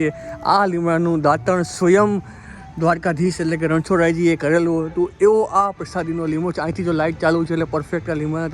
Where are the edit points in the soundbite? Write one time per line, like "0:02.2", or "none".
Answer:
none